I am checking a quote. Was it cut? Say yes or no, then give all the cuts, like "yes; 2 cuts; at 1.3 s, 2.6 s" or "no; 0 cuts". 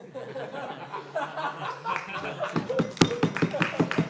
no; 0 cuts